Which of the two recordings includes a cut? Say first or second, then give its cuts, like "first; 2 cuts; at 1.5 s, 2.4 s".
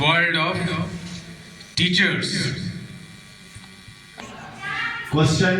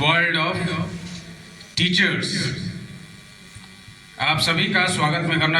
first; 1 cut; at 4.2 s